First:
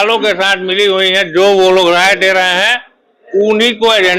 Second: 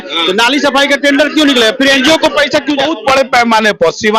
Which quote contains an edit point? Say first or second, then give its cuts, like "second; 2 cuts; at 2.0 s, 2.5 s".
second; 1 cut; at 2.8 s